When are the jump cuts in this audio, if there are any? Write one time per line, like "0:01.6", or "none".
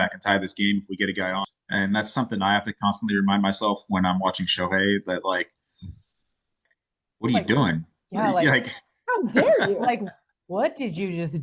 0:01.4
0:06.6